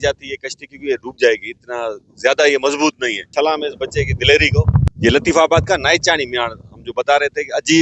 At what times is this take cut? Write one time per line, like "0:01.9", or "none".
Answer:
0:03.3